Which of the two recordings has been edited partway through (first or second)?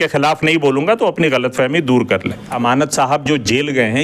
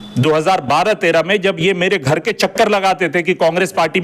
first